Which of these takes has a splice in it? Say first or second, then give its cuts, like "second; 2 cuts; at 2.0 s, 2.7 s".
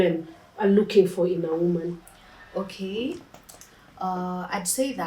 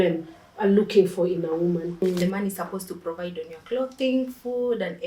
second; 1 cut; at 2.0 s